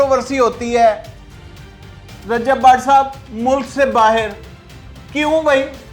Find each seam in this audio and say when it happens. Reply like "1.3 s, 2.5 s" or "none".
none